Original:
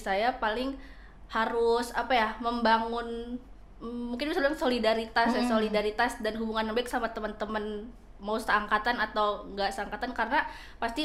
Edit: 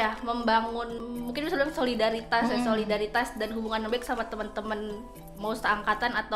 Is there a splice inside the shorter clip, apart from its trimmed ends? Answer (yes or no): yes